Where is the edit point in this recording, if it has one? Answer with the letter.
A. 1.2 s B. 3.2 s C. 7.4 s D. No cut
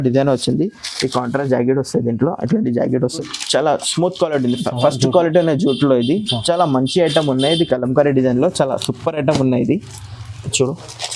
B